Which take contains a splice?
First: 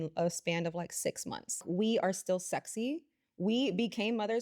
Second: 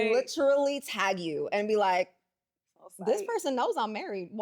first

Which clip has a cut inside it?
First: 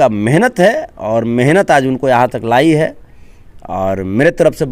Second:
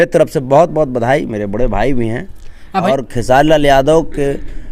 second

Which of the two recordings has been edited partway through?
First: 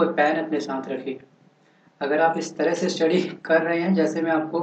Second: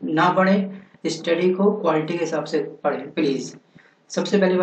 second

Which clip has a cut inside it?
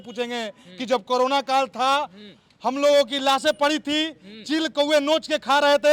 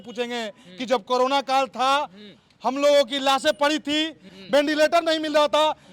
second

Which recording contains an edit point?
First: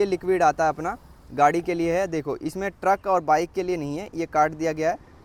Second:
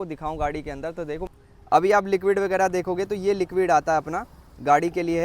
second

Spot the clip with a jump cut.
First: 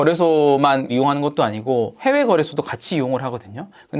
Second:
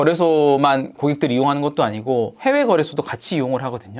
first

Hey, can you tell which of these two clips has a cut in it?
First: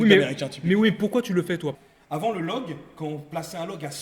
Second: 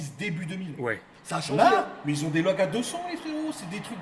first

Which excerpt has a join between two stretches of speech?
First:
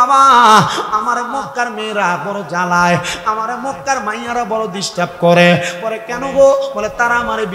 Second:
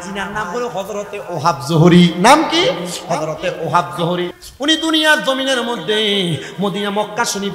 second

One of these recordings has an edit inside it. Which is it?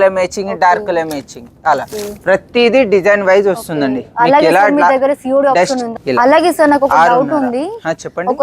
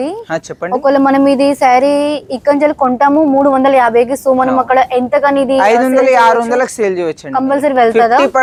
first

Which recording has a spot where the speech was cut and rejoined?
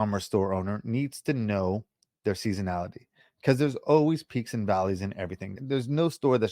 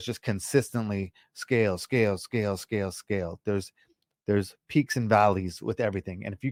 first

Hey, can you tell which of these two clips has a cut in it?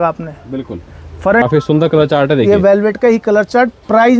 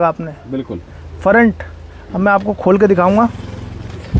first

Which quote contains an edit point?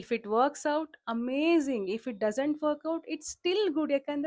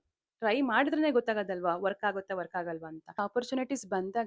second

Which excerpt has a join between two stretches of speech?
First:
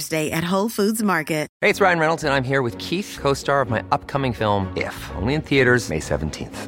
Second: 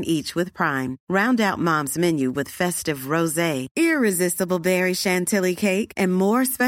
first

